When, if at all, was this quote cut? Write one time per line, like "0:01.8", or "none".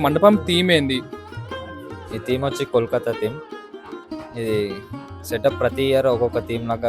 none